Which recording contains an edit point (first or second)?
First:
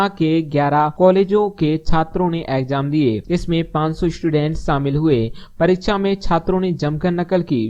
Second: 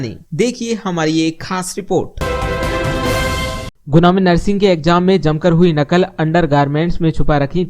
second